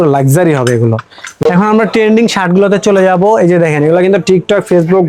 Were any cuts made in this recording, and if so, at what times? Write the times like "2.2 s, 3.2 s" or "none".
1.3 s